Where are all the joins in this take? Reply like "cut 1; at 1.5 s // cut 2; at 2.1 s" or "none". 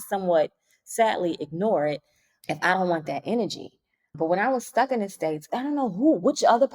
cut 1; at 5.4 s